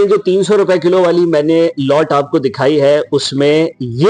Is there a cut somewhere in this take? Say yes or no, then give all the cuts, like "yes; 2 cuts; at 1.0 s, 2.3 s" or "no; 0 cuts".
no; 0 cuts